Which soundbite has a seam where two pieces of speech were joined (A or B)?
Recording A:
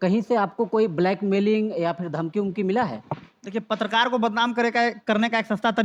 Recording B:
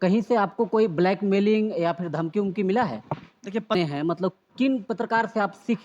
B